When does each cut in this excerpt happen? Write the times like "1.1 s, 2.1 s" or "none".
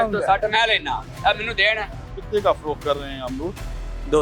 2.0 s